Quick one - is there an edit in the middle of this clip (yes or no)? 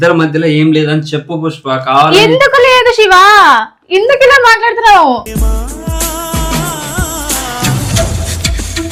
no